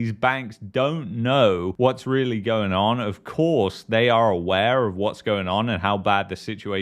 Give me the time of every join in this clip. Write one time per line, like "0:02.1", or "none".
none